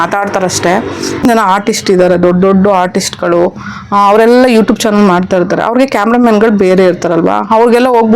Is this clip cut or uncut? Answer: cut